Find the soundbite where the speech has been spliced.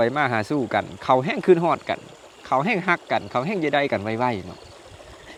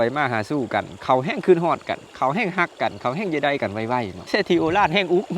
second; 2 cuts; at 2.1 s, 4.2 s

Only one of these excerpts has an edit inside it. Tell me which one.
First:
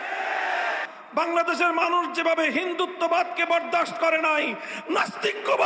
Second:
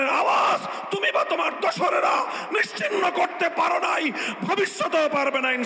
first; 1 cut; at 0.9 s

